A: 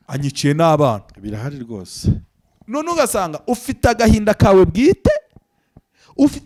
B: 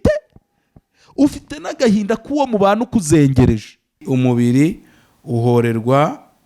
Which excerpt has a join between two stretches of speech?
B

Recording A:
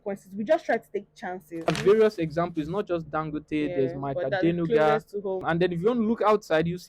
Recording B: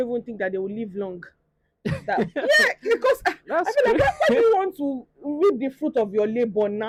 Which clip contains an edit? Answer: A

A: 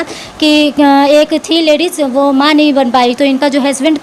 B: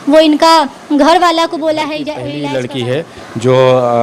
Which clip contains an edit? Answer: B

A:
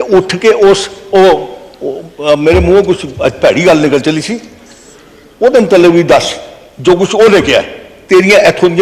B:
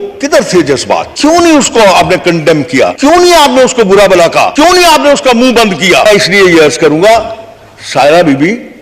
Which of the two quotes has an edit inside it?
B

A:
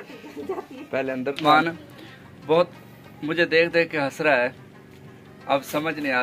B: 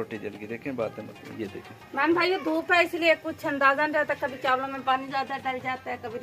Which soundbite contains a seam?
A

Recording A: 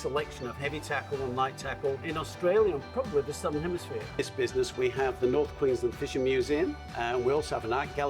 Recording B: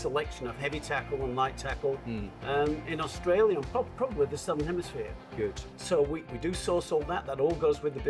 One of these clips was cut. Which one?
A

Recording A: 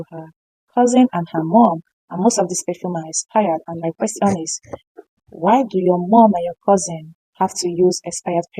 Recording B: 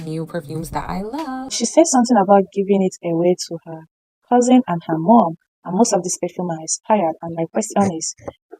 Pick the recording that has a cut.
B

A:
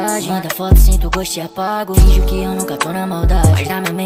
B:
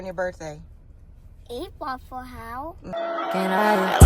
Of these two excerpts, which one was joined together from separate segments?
B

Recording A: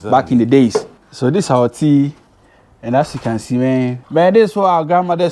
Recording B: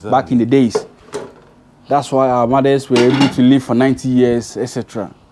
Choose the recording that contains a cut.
A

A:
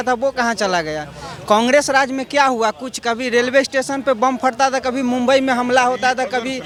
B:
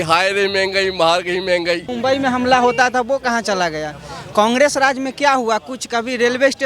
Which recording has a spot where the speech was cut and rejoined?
B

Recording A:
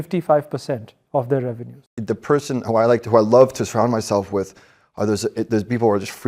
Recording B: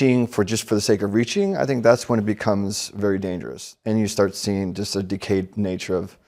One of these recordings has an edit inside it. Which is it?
A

